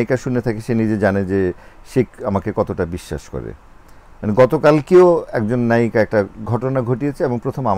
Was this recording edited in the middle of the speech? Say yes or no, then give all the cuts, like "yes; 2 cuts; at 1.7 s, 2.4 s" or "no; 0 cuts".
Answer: no; 0 cuts